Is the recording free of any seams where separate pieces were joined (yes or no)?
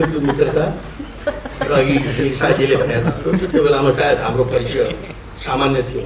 yes